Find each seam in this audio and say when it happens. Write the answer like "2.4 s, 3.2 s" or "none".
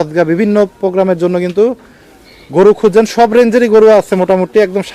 none